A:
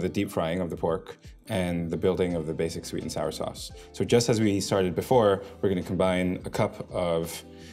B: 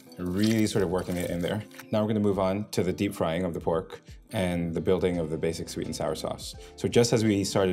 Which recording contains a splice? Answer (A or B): B